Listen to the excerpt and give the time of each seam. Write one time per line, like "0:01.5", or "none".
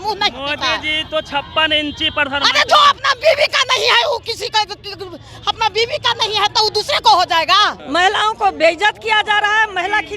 0:07.8